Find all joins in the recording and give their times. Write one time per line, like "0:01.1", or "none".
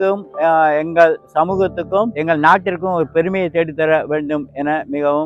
none

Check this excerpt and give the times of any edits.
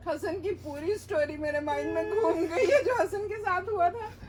none

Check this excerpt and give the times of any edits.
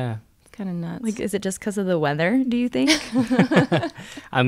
none

